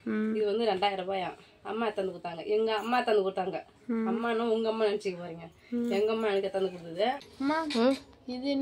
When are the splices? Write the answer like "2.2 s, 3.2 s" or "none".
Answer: 7.2 s